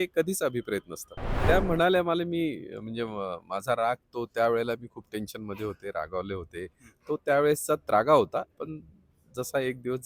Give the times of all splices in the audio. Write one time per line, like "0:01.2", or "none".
0:01.4